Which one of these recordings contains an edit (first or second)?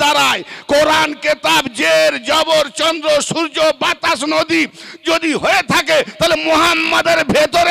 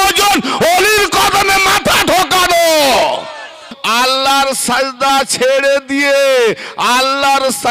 second